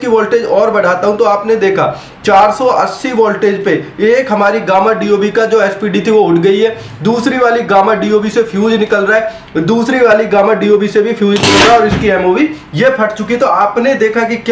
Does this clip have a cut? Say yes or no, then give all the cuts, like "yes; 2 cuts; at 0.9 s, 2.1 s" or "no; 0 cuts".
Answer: no; 0 cuts